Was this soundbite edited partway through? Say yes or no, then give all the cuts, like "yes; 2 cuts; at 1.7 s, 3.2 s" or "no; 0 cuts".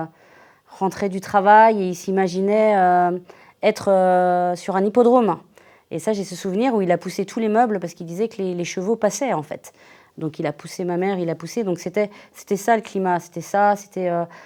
no; 0 cuts